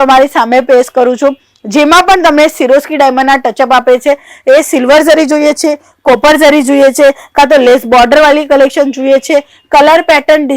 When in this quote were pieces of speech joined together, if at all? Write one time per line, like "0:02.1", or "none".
none